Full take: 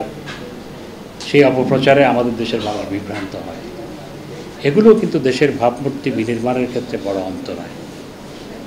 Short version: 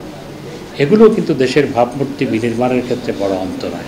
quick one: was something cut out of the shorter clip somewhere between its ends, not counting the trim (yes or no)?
no